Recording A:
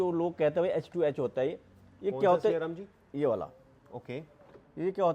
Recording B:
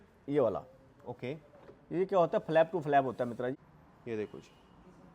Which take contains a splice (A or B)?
B